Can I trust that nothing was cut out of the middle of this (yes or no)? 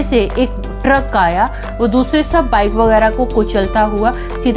no